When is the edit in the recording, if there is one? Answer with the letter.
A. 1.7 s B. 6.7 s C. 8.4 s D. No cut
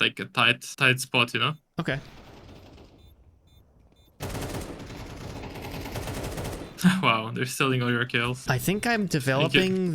C